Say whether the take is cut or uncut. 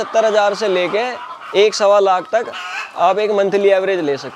uncut